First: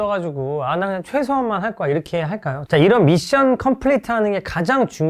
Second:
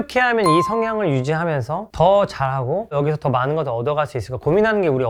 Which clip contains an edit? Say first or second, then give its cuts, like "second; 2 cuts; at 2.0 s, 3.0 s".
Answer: first; 1 cut; at 2.6 s